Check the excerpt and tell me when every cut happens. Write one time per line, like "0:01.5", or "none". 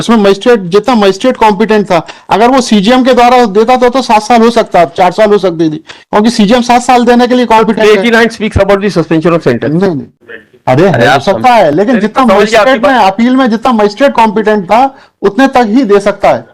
0:10.1